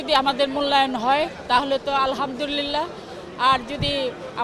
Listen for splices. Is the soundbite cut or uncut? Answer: uncut